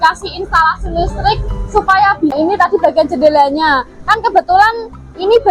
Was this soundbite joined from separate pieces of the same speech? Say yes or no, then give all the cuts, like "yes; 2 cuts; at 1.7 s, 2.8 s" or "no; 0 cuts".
yes; 1 cut; at 2.3 s